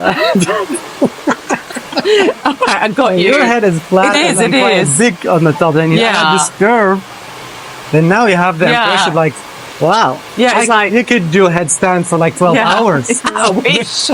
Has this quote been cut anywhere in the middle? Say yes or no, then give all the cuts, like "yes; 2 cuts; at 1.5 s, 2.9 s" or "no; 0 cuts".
no; 0 cuts